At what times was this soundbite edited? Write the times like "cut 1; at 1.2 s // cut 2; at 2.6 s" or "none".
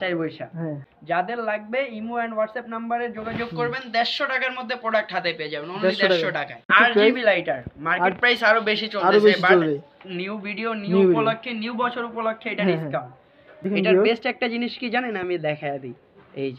cut 1; at 0.9 s // cut 2; at 6.6 s // cut 3; at 13.7 s